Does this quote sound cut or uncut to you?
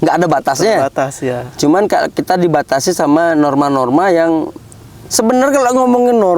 uncut